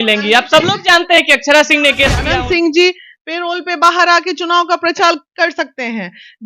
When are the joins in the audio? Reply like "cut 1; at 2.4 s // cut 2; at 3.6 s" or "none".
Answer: cut 1; at 2.2 s